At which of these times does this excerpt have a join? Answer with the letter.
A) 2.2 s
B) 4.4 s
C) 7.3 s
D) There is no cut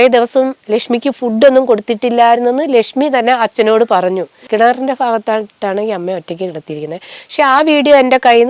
B